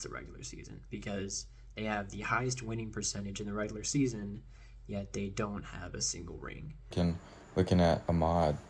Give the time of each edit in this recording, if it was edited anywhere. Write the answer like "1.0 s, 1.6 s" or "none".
6.9 s